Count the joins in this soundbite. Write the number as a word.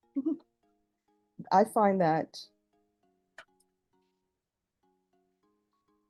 zero